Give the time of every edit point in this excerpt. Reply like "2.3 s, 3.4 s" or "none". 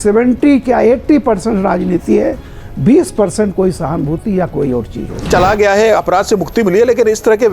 5.3 s